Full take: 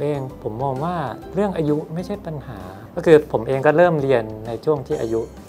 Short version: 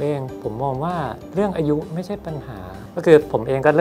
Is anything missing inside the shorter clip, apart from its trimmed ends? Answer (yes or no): no